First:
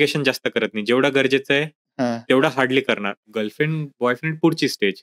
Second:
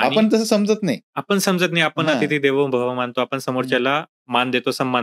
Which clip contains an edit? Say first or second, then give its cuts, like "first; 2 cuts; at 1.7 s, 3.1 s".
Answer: first; 1 cut; at 3.2 s